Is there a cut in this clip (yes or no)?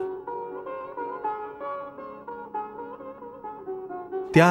no